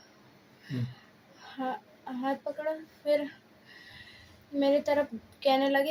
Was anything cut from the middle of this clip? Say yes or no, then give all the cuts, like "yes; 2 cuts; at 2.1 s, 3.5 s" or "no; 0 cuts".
no; 0 cuts